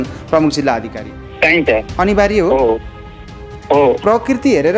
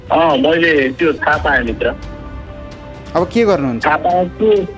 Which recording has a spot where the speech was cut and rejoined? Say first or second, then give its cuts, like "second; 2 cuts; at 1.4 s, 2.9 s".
first; 1 cut; at 1.2 s